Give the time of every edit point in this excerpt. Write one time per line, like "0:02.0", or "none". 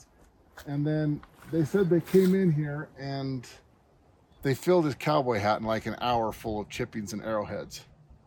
none